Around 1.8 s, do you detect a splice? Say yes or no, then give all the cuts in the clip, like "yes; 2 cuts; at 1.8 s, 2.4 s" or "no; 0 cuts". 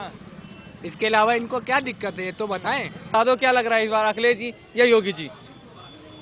no; 1 cut; at 3.1 s